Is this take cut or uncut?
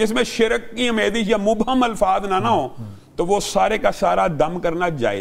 uncut